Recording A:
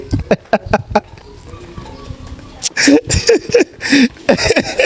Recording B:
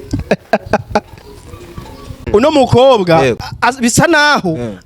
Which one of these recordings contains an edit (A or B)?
B